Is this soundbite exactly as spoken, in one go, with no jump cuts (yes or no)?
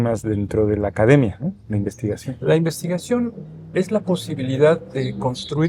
yes